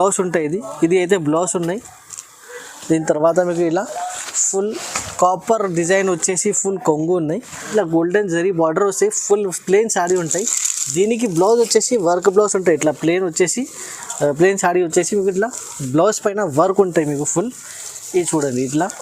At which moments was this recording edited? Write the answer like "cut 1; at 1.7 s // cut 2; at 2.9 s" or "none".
cut 1; at 7.7 s